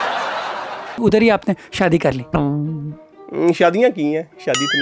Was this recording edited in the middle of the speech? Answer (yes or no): yes